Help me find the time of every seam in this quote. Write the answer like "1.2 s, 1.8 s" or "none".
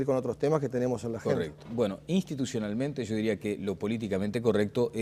2.1 s